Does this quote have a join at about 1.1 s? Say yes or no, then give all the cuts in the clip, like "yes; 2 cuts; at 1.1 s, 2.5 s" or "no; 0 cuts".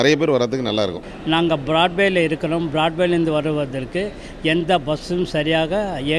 yes; 1 cut; at 1.1 s